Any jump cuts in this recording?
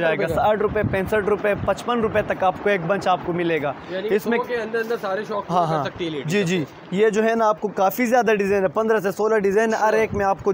no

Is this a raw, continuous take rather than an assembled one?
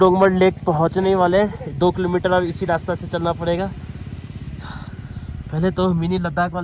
yes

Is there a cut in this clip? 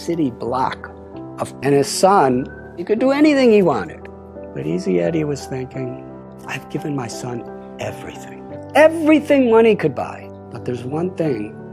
yes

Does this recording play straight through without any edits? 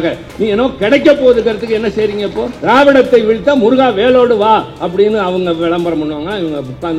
no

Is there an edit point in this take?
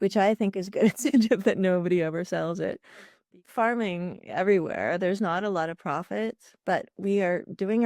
yes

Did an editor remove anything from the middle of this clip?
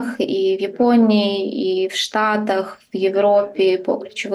no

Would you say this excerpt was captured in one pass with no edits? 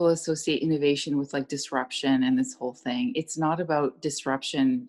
yes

